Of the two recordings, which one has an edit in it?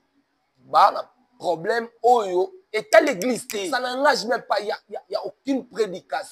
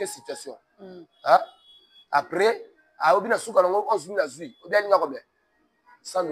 first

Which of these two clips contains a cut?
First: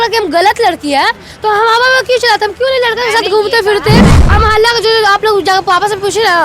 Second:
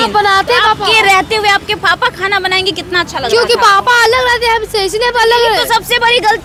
first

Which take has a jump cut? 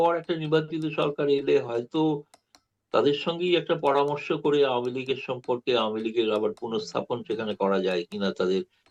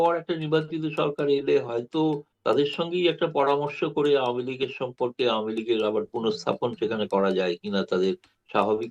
second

